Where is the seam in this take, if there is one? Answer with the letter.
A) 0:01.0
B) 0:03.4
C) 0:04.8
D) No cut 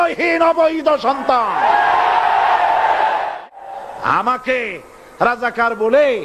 B